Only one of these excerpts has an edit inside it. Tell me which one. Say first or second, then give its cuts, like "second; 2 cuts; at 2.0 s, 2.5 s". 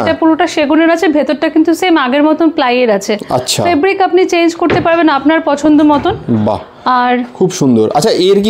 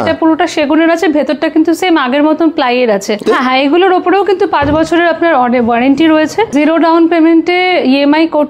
second; 2 cuts; at 3.2 s, 6.5 s